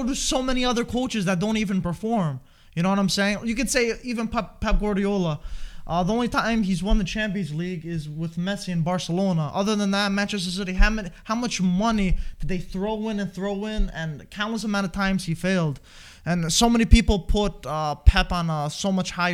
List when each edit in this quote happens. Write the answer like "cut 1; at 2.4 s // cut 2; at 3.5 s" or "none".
none